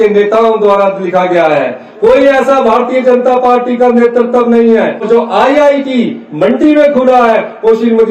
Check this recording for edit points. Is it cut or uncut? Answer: cut